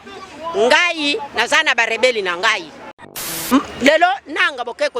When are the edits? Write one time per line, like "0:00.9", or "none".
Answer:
0:03.3